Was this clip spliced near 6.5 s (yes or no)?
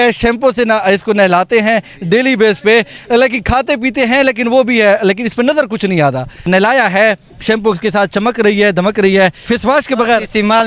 yes